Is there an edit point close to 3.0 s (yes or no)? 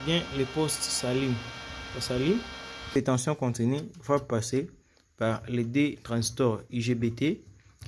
yes